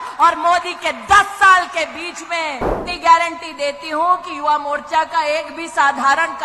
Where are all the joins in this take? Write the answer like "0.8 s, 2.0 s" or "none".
2.8 s